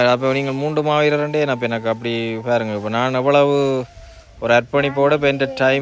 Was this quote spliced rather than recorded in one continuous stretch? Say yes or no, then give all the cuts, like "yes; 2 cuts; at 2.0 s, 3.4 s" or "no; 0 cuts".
no; 0 cuts